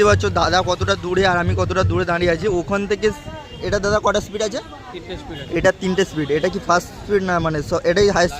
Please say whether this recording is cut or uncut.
uncut